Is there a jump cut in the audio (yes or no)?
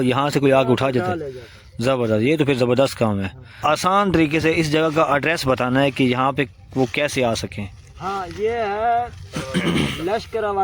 yes